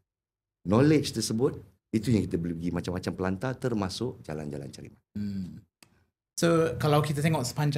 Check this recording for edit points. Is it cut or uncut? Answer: uncut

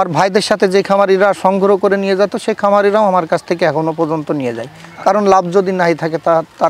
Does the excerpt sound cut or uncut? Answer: uncut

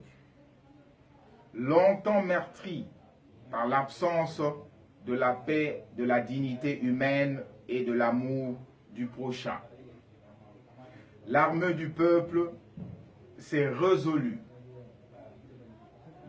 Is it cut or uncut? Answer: uncut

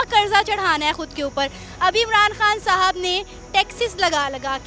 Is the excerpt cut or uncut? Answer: uncut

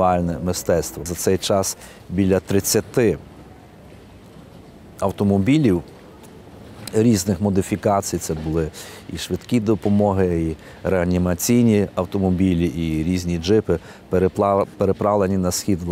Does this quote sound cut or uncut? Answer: cut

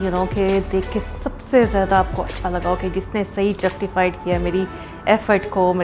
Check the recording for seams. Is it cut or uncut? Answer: uncut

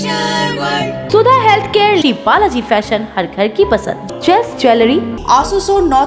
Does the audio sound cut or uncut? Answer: cut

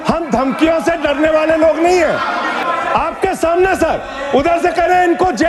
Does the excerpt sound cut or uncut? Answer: cut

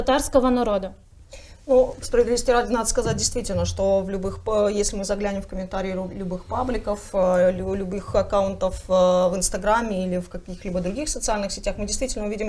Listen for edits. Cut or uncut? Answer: uncut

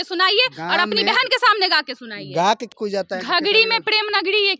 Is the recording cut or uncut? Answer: cut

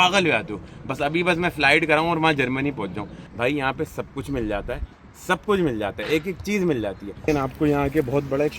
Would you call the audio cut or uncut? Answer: cut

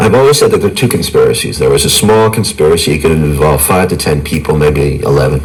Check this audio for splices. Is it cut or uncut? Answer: uncut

